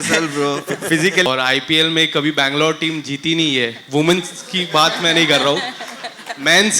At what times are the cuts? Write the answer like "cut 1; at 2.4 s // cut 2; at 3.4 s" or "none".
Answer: cut 1; at 1.3 s